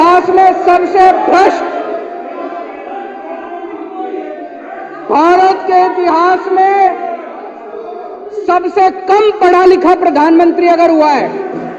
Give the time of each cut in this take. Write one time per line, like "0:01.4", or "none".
none